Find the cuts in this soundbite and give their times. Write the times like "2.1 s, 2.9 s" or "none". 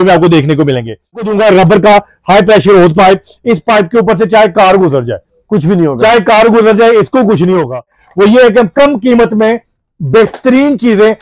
1.2 s, 8.0 s